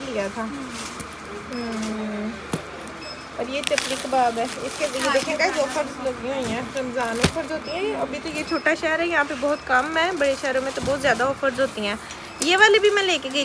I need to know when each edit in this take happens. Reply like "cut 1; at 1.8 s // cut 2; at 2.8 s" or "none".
none